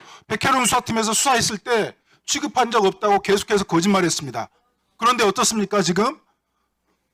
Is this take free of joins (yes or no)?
yes